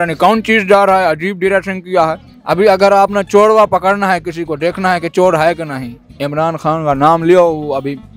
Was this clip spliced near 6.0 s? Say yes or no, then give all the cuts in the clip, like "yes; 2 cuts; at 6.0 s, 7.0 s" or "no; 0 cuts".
no; 1 cut; at 2.3 s